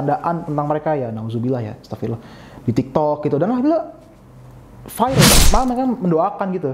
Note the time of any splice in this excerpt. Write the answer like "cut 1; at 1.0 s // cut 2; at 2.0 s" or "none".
cut 1; at 5.3 s